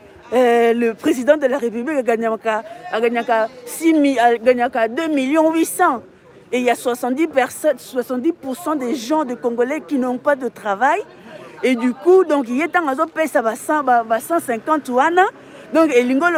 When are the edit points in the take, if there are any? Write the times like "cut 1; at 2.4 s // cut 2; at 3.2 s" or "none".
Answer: none